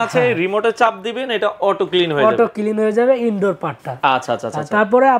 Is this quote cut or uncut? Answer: uncut